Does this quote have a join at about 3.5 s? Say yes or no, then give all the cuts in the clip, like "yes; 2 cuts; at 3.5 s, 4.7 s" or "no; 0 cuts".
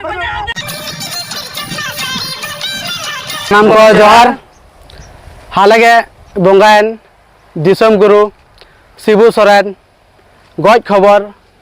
yes; 1 cut; at 3.5 s